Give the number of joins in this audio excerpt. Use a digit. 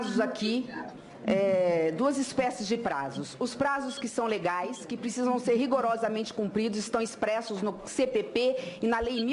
1